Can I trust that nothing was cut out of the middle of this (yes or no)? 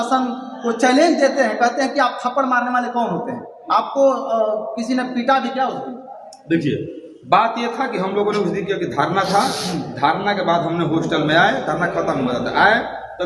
yes